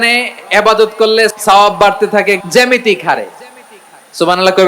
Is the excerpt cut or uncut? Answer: cut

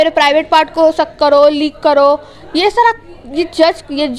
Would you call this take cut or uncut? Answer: uncut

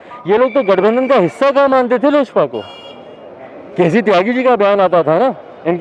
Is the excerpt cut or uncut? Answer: uncut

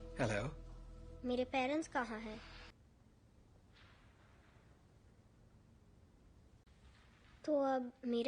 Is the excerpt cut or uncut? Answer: cut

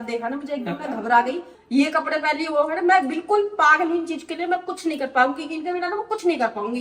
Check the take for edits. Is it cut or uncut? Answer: cut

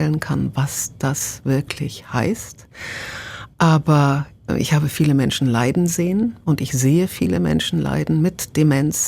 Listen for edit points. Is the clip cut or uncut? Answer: cut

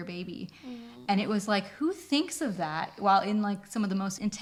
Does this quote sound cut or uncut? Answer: uncut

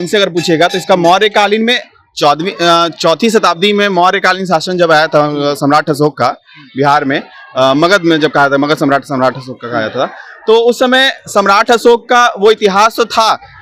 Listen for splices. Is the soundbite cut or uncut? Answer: uncut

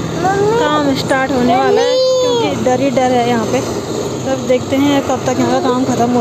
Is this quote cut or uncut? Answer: uncut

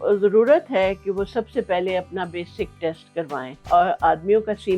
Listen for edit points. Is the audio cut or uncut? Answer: cut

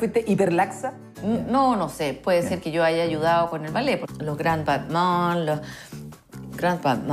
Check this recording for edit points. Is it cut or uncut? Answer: cut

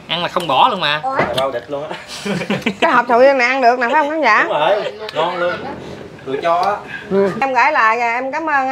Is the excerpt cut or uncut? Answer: cut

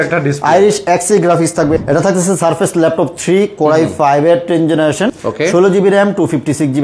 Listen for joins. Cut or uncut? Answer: cut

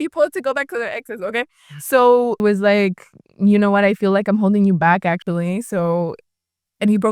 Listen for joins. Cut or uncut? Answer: cut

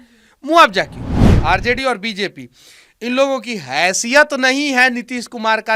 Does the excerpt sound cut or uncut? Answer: cut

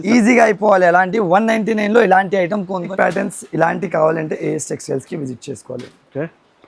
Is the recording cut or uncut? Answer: cut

